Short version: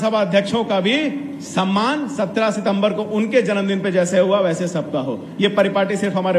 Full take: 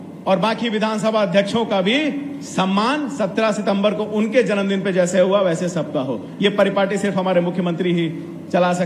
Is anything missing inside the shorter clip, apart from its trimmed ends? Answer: no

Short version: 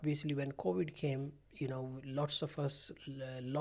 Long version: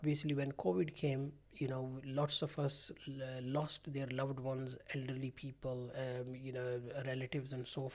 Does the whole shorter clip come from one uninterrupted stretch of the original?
yes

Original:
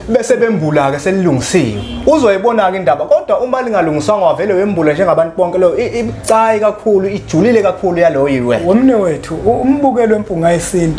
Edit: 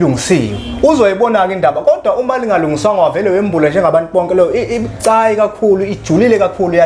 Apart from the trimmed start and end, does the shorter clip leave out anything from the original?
no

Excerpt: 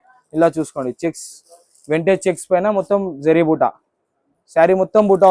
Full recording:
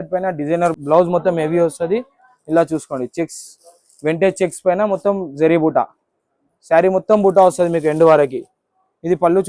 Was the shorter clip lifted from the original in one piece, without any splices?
yes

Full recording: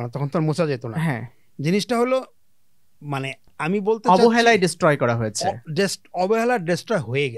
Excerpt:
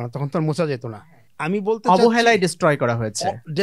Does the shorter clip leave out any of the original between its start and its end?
yes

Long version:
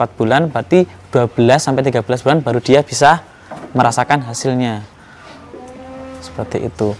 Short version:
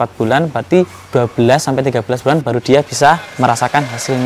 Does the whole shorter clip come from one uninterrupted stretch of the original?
no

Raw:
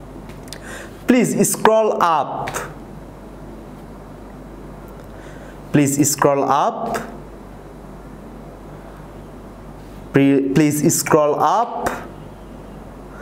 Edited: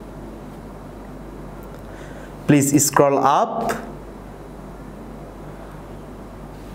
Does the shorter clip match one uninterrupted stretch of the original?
yes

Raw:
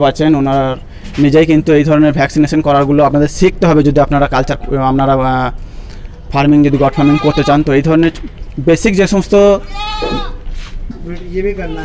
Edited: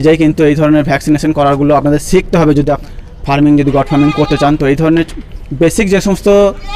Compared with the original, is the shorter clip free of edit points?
no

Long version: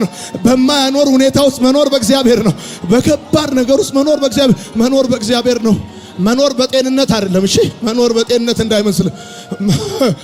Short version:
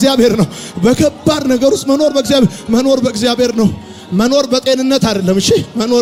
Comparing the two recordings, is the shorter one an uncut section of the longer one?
yes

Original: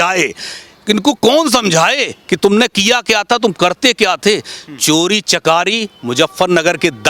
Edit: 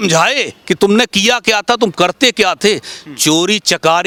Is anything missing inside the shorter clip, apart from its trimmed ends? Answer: no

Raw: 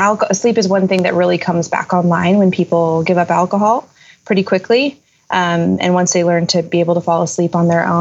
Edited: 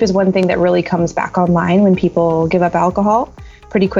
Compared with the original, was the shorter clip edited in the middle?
no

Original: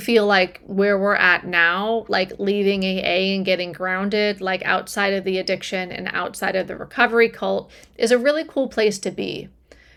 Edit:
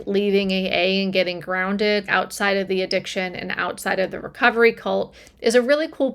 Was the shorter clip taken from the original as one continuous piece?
no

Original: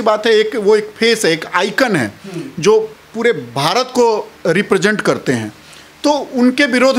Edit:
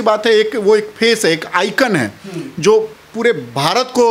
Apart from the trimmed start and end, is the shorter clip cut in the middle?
no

